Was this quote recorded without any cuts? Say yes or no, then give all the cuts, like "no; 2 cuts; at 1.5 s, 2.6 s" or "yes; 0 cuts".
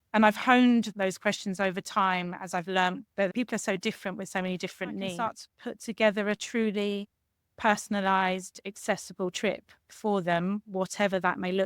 no; 3 cuts; at 0.9 s, 3.3 s, 5.3 s